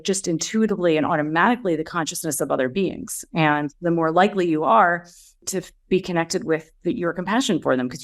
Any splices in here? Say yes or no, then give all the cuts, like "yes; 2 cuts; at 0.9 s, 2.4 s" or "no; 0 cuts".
yes; 1 cut; at 5.4 s